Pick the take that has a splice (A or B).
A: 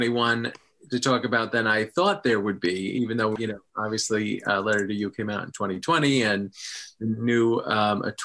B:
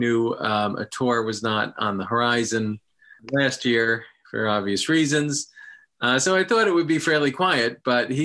A